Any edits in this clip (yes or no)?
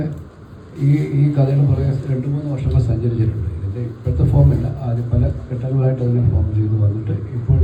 no